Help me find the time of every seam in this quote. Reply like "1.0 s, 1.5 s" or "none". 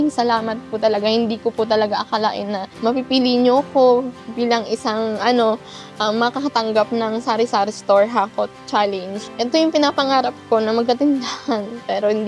none